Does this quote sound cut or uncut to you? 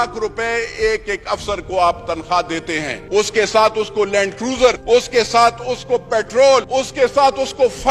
cut